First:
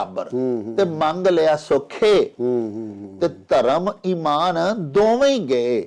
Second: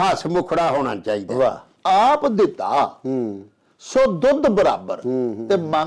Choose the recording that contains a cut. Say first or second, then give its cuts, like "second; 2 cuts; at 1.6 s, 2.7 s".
second; 1 cut; at 1.7 s